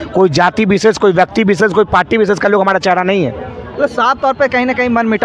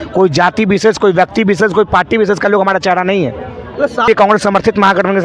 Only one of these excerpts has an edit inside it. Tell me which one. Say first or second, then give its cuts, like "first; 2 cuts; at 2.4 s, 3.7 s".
second; 1 cut; at 4.0 s